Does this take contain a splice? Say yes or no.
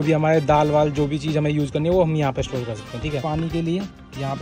yes